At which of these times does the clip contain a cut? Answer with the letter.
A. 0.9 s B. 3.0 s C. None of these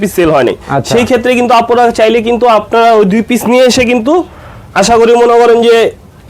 C